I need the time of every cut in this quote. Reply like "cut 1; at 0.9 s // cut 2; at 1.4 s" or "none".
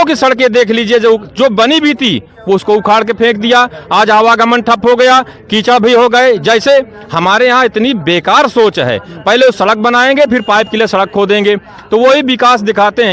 none